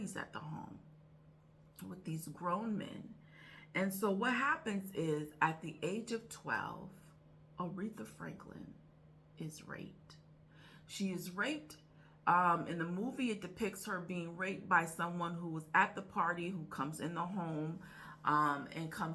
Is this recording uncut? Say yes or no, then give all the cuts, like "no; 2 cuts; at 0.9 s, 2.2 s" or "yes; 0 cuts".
yes; 0 cuts